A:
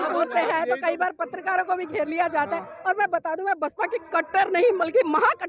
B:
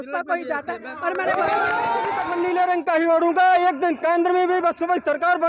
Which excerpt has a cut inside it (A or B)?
B